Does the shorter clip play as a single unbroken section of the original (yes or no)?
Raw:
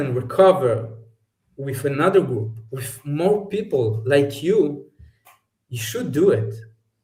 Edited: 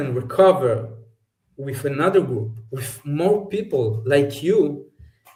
yes